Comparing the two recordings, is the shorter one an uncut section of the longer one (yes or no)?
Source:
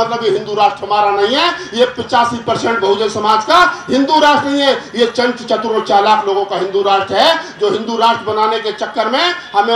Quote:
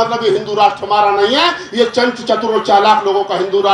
no